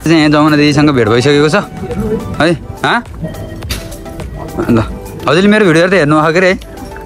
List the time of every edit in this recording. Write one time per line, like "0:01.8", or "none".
none

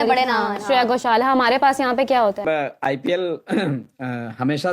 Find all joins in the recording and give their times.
0:02.4

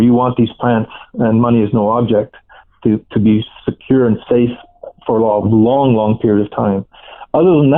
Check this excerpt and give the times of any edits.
none

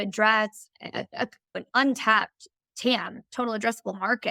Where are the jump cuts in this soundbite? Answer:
none

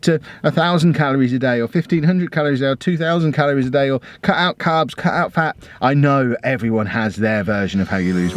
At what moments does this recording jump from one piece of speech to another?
none

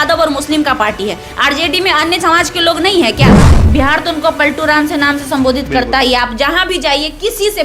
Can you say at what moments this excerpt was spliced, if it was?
0:03.5

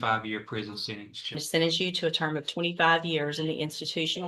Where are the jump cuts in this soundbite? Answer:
0:01.4

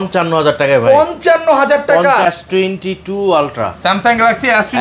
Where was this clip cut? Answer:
0:02.2

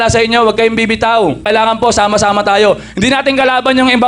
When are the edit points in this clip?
0:01.4

